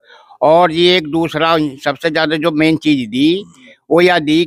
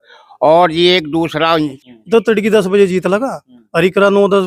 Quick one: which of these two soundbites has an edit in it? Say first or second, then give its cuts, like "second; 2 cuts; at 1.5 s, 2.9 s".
second; 1 cut; at 1.8 s